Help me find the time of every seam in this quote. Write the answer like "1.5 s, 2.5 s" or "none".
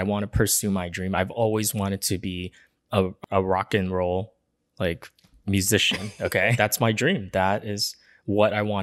3.2 s, 6.5 s